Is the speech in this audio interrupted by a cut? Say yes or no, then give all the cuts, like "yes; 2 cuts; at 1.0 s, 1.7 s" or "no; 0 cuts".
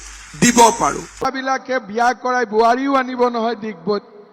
yes; 1 cut; at 1.2 s